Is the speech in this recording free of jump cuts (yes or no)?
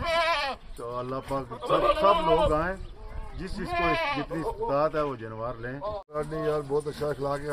no